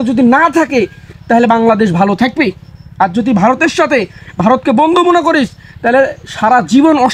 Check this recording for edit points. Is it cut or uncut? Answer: uncut